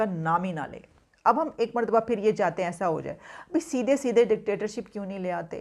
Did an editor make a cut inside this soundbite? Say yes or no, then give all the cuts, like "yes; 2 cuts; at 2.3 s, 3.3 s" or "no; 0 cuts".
no; 0 cuts